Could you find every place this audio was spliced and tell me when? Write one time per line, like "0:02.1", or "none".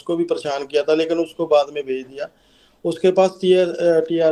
none